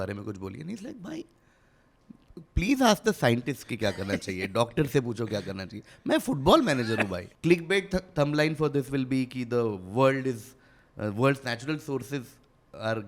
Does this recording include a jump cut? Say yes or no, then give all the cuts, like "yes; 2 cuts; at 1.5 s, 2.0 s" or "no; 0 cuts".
yes; 1 cut; at 7.2 s